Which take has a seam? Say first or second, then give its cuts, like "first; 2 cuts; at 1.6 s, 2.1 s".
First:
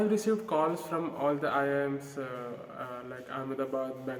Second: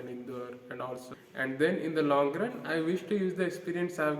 second; 1 cut; at 1.1 s